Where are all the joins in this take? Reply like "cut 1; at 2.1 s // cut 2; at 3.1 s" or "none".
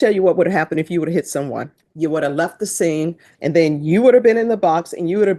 cut 1; at 1.8 s // cut 2; at 3.3 s